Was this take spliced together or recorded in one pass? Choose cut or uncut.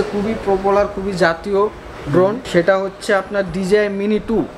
cut